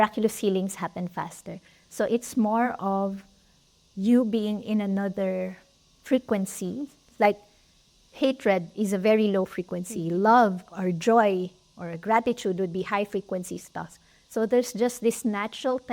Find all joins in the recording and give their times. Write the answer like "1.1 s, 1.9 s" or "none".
none